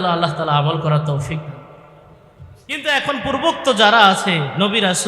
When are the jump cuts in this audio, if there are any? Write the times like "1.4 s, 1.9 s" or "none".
2.8 s